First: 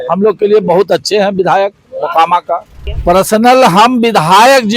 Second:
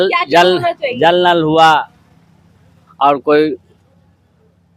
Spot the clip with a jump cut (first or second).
first